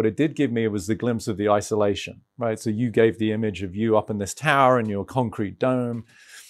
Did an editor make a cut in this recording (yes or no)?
no